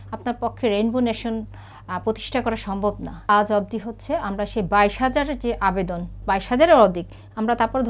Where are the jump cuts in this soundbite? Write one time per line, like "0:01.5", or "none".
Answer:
0:03.2